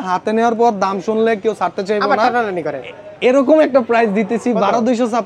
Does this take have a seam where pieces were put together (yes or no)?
no